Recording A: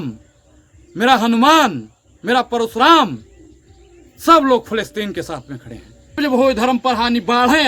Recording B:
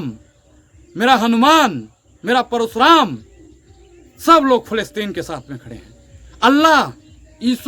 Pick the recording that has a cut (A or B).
A